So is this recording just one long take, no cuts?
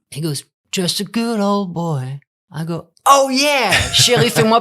no; 1 cut; at 2.9 s

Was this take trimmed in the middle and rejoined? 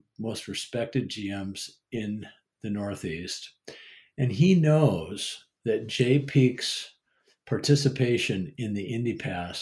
no; 0 cuts

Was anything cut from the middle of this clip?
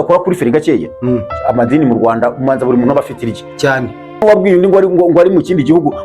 yes; 1 cut; at 4.2 s

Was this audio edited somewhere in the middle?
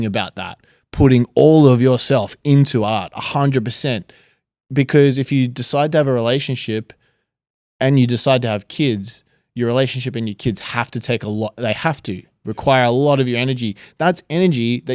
no; 0 cuts

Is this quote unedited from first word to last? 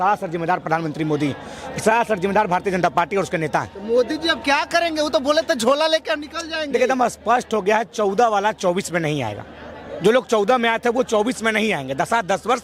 yes; 0 cuts

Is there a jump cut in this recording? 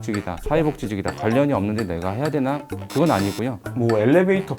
yes; 1 cut; at 3.6 s

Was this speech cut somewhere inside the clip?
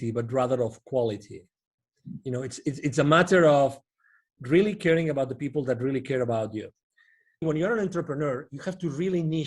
yes; 1 cut; at 7.4 s

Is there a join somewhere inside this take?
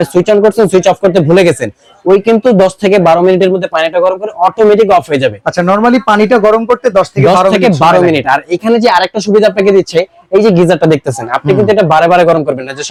no; 0 cuts

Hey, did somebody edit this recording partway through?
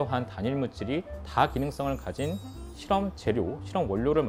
no; 0 cuts

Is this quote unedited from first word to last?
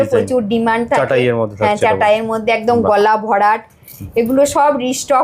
yes; 0 cuts

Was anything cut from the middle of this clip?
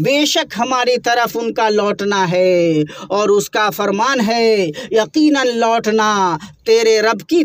no; 0 cuts

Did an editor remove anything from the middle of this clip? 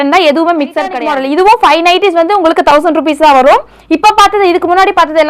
yes; 1 cut; at 1.1 s

